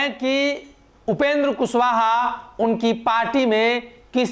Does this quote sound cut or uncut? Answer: uncut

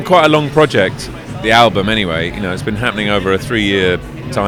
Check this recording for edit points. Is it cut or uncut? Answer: uncut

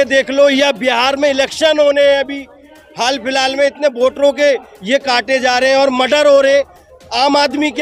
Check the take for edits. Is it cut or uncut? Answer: uncut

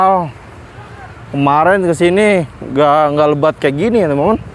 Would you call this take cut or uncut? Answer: uncut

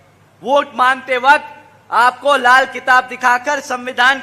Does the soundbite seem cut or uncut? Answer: uncut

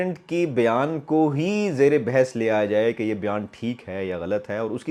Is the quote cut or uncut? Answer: uncut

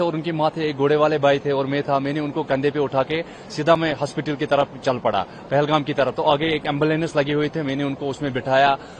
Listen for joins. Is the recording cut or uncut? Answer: uncut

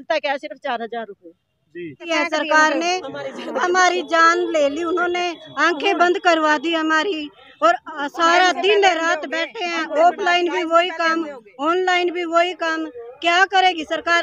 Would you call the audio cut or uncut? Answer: cut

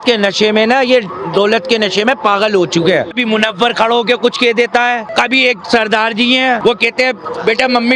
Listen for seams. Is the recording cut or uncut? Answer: cut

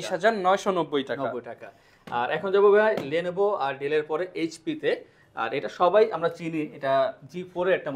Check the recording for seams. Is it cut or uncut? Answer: uncut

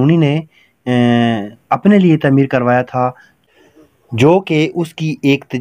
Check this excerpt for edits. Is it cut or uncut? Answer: uncut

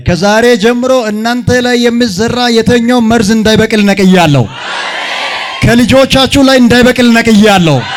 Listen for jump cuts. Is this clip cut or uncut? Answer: uncut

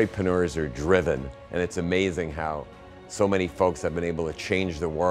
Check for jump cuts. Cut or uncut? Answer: cut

